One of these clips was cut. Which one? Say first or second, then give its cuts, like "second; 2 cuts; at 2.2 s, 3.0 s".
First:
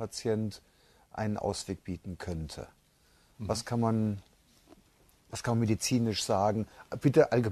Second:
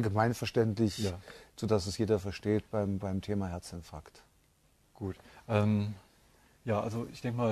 second; 1 cut; at 5.0 s